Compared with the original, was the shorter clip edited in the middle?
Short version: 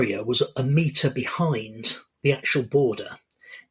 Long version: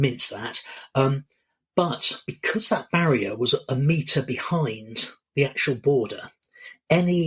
no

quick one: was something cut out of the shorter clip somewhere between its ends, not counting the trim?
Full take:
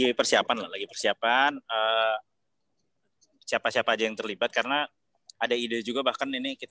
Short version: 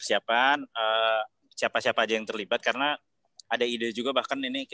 yes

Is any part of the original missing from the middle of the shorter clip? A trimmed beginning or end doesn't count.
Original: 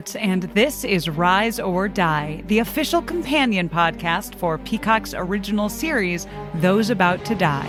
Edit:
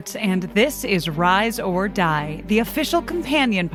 no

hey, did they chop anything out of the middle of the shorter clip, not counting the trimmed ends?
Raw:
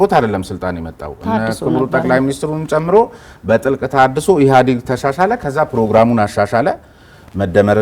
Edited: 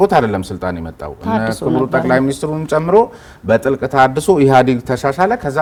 no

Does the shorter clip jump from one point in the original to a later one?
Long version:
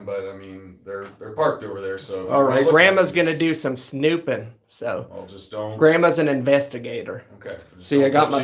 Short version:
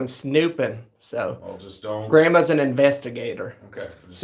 no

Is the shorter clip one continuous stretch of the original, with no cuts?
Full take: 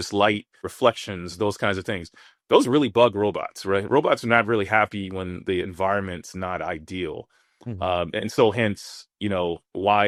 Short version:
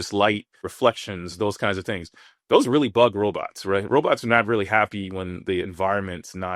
yes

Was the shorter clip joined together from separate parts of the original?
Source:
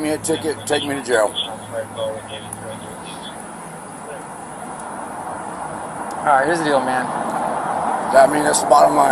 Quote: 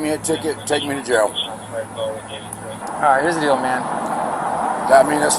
yes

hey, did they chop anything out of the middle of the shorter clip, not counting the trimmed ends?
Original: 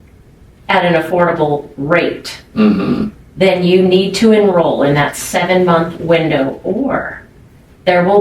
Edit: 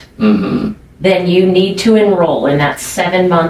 no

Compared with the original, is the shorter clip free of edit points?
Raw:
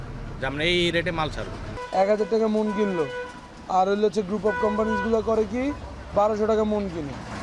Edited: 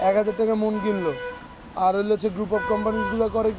yes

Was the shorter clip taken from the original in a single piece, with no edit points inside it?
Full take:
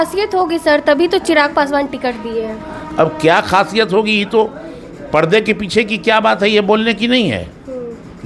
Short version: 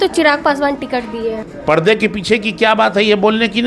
no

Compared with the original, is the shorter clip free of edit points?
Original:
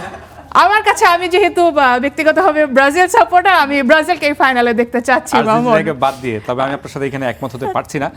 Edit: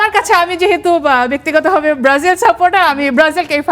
yes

